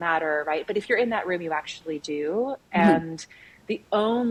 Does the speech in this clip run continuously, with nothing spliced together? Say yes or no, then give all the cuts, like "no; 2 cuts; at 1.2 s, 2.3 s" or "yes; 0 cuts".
yes; 0 cuts